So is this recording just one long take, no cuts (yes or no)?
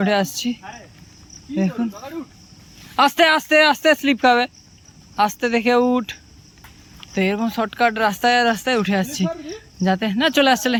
yes